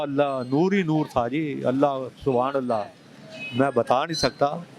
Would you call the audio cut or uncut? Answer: uncut